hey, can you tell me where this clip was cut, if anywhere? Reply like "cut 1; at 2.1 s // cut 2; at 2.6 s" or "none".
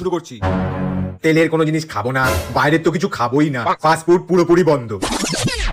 none